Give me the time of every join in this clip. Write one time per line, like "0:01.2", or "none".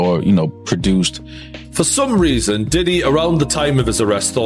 0:01.6